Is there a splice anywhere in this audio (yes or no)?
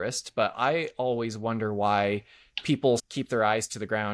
yes